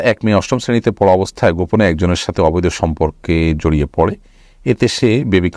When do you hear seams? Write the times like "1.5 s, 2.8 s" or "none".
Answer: none